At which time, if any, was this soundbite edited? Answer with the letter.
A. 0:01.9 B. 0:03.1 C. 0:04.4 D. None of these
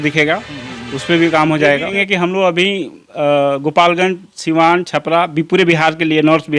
A